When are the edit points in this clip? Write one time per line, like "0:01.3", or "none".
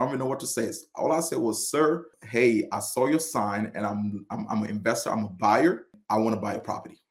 0:02.2
0:06.0